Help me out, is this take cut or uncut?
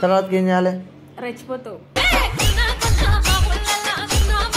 uncut